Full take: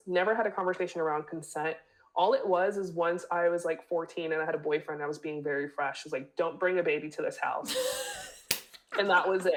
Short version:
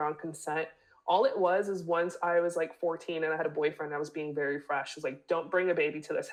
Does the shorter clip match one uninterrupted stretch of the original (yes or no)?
yes